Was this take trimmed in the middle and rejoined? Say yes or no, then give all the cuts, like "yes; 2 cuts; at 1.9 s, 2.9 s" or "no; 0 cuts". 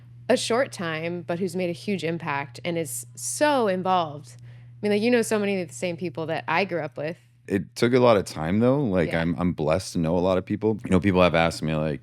yes; 2 cuts; at 7.4 s, 10.8 s